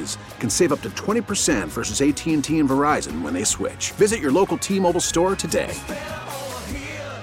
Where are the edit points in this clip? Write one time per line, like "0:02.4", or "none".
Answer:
none